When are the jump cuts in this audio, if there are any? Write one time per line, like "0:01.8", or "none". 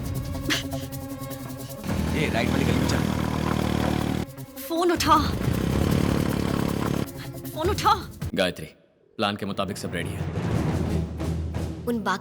0:08.1